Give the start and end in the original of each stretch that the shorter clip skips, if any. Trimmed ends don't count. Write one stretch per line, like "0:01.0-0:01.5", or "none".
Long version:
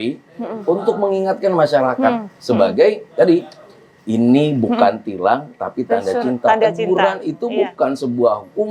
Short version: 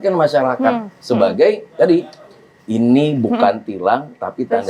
none